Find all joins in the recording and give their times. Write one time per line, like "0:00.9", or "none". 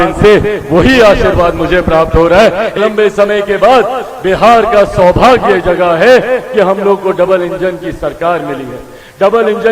0:02.7

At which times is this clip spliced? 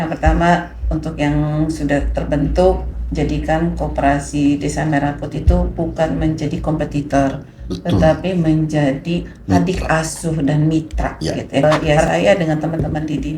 0:11.6

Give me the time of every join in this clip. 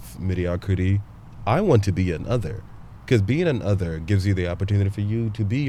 none

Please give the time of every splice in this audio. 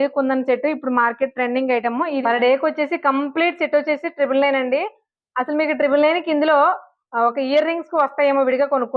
0:02.2

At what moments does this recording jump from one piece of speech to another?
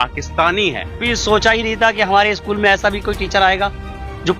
0:01.0

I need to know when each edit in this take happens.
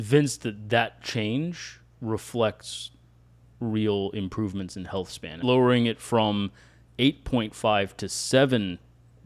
0:05.4

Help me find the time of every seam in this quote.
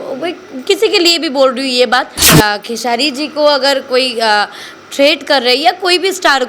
0:02.3

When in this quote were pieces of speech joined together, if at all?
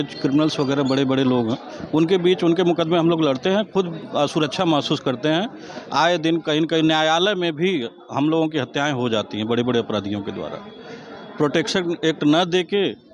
none

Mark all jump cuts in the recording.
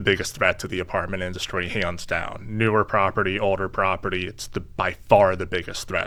none

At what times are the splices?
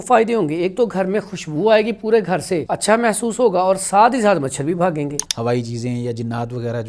0:02.7
0:05.2

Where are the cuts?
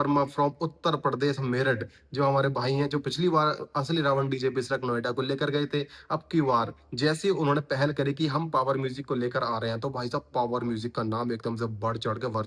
none

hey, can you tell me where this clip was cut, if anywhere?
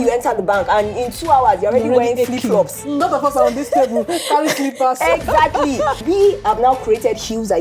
0:03.0
0:06.0

